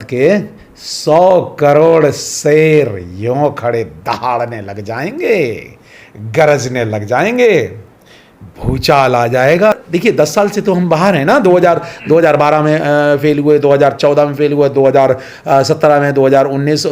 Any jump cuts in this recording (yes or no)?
yes